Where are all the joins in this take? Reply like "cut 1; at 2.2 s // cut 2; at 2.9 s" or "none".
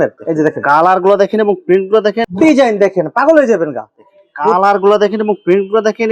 cut 1; at 2.2 s